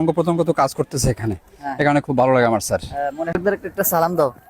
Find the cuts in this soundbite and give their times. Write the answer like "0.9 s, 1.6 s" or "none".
3.3 s